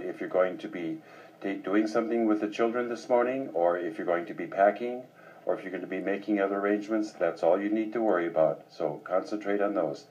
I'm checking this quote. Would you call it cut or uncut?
uncut